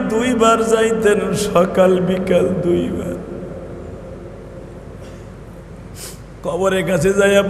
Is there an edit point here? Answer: no; 0 cuts

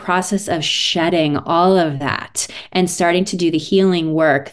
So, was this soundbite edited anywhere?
no; 0 cuts

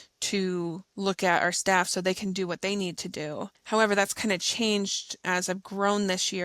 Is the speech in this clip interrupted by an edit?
yes; 3 cuts; at 0.8 s, 3.6 s, 5.1 s

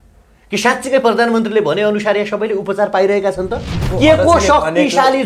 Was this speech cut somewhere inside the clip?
yes; 1 cut; at 3.8 s

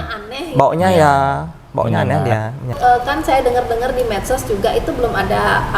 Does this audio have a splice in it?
yes; 1 cut; at 2.7 s

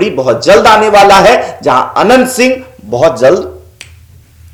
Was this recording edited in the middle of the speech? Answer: no; 0 cuts

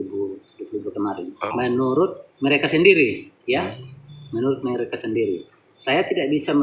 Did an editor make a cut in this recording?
no; 0 cuts

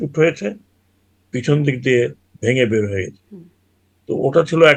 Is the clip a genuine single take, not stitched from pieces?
yes; 0 cuts

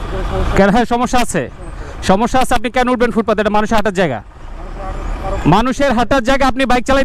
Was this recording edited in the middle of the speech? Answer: no; 0 cuts

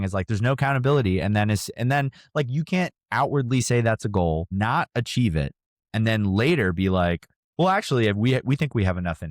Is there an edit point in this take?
yes; 1 cut; at 4.5 s

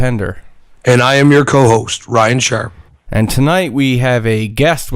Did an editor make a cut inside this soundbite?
yes; 1 cut; at 3.5 s

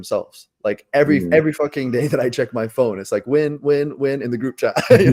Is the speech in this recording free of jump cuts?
yes; 0 cuts

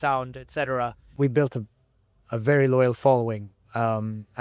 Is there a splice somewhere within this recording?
yes; 1 cut; at 1.2 s

